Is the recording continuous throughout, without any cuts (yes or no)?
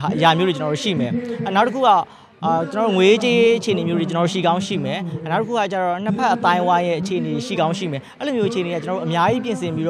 yes